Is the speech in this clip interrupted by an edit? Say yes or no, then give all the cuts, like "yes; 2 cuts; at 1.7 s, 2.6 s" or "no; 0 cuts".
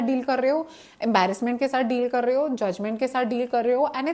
no; 0 cuts